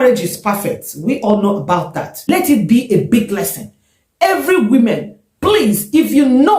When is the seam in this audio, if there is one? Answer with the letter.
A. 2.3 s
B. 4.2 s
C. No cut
A